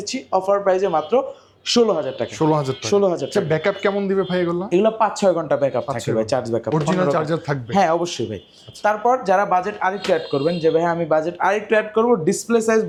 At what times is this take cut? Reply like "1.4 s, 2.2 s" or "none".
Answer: none